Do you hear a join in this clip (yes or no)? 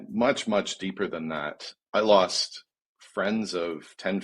yes